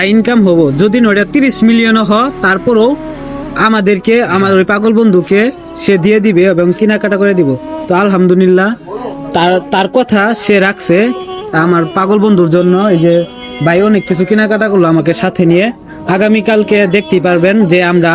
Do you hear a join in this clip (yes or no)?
no